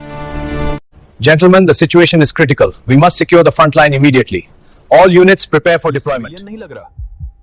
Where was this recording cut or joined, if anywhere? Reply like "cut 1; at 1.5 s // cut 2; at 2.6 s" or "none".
cut 1; at 6.3 s